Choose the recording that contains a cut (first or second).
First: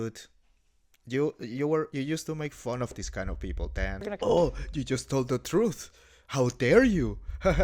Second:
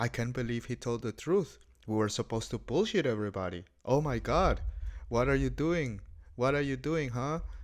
first